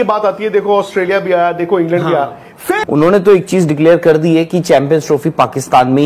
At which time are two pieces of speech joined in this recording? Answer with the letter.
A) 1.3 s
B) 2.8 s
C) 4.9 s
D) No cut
B